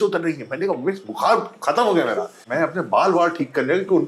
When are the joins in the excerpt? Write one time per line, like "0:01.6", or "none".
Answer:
0:02.4